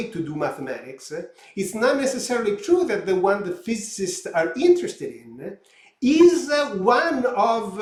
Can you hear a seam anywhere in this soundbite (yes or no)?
no